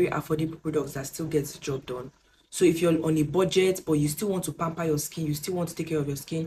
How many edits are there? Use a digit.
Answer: 0